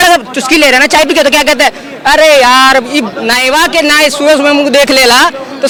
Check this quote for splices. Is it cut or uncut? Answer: uncut